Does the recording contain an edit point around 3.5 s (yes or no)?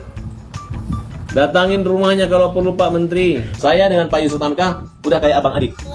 yes